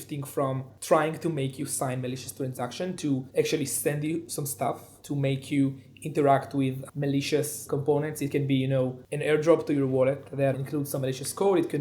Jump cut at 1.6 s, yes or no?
no